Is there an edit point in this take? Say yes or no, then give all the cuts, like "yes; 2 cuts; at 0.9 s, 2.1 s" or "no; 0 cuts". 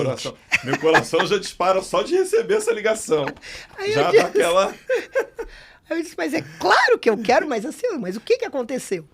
no; 0 cuts